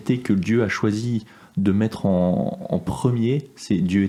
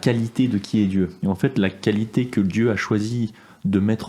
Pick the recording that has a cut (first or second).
second